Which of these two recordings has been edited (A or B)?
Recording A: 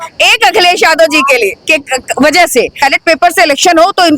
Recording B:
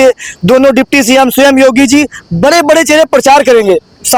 A